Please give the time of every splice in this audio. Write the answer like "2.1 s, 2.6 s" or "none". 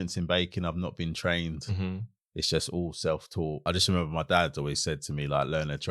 3.6 s